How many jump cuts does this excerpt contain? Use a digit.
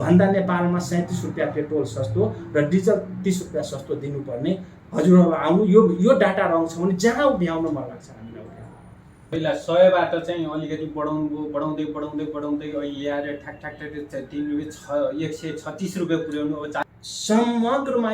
2